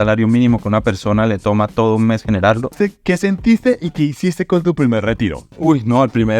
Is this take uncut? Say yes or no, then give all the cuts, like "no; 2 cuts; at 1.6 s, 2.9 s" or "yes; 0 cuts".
no; 1 cut; at 2.7 s